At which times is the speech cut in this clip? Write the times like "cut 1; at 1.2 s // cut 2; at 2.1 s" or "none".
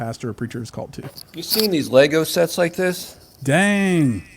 cut 1; at 1.2 s